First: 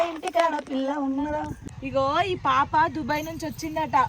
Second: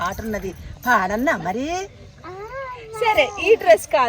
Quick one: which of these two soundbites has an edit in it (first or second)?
first